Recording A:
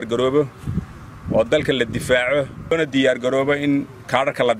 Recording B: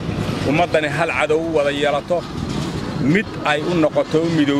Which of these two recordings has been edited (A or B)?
A